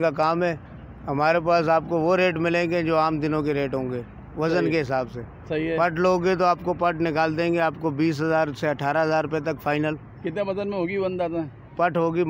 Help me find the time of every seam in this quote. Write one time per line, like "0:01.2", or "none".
none